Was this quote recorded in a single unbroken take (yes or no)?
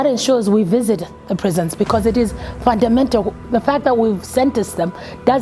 yes